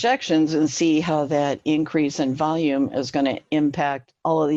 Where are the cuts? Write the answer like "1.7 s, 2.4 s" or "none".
none